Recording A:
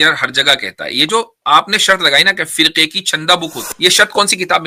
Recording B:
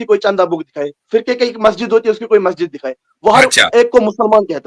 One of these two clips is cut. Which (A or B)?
A